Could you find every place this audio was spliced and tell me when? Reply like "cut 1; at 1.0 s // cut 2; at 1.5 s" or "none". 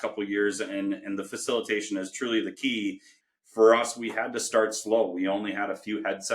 cut 1; at 3.1 s